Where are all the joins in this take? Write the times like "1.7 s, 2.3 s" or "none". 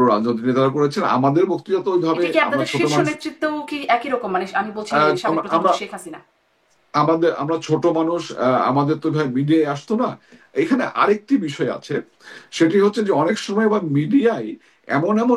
none